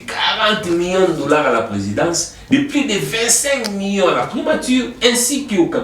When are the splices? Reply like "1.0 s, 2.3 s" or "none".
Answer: none